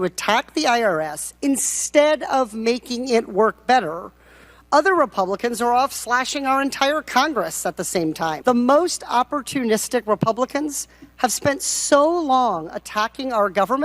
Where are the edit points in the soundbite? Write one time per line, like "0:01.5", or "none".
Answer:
0:08.4